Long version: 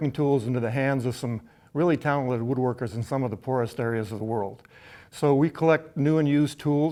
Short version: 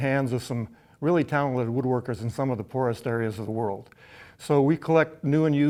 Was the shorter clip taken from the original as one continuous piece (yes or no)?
yes